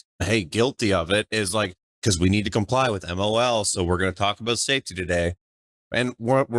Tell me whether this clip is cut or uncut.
cut